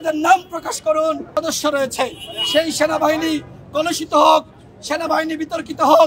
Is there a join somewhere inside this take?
yes; 1 cut; at 1.3 s

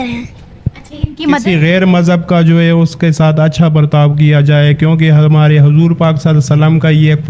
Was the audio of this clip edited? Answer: yes; 1 cut; at 1.4 s

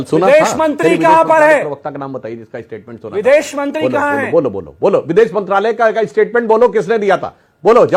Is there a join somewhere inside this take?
no; 0 cuts

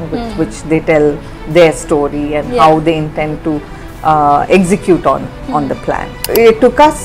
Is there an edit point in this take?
yes; 1 cut; at 6.2 s

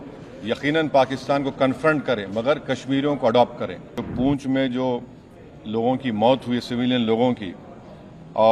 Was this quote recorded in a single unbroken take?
no; 1 cut; at 4.0 s

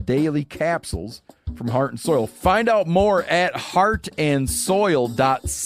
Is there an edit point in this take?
no; 0 cuts

